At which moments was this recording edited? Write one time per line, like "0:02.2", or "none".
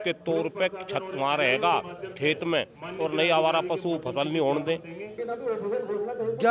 0:05.1

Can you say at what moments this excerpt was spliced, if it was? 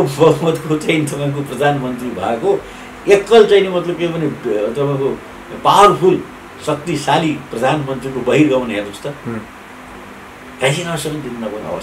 none

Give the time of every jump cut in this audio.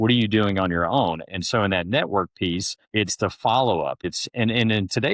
0:02.8
0:04.0

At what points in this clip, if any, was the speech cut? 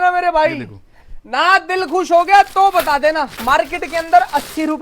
0:03.3

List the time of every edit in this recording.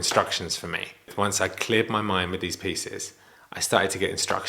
0:01.1

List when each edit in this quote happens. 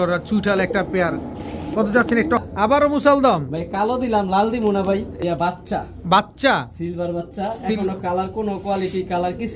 0:02.5
0:05.1

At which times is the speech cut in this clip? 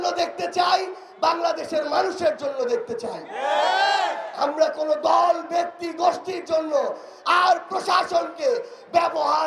none

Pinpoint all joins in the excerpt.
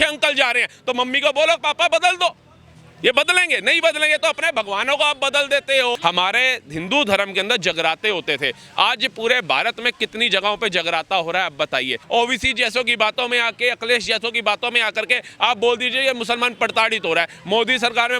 0:06.0
0:12.0

